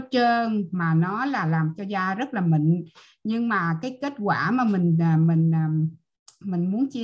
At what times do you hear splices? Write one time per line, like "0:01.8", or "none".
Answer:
none